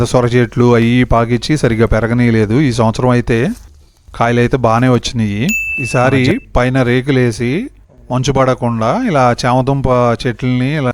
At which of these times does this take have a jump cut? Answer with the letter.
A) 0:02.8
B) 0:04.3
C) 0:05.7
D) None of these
C